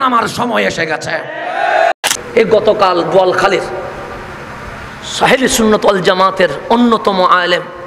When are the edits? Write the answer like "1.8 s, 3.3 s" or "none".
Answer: 1.9 s

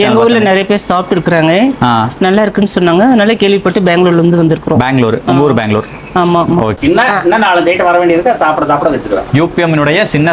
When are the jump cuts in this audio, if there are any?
6.8 s

